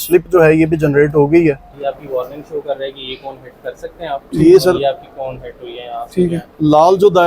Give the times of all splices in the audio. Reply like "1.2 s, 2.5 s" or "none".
1.7 s